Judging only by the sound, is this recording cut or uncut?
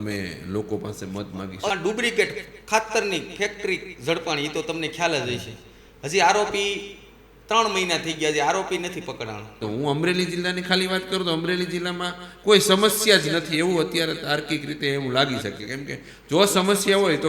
cut